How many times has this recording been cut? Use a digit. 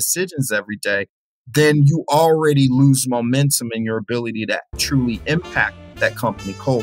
1